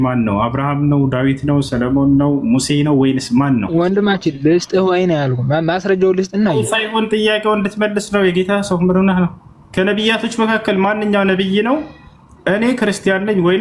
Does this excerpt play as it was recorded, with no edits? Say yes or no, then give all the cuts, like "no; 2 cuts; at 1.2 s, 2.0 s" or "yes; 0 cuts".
yes; 0 cuts